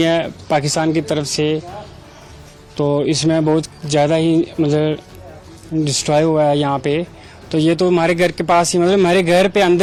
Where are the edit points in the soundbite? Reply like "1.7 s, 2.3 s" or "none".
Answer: none